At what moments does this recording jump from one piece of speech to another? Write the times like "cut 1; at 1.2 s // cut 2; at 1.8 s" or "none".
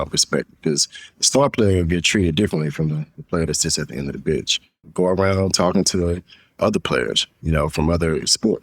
cut 1; at 4.9 s